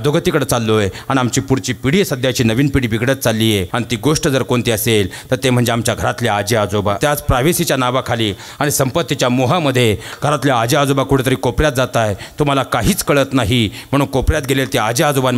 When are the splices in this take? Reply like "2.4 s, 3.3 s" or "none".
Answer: 3.7 s, 7.0 s